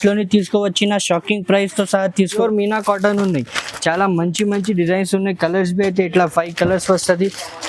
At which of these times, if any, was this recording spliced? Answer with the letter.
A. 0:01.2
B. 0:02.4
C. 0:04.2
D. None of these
B